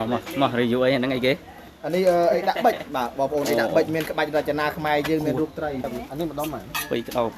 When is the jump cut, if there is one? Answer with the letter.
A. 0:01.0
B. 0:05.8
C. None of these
B